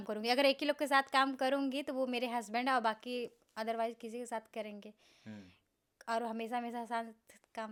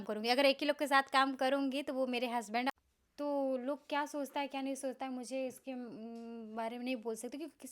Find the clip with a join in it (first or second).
second